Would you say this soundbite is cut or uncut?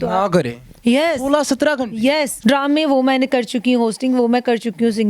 cut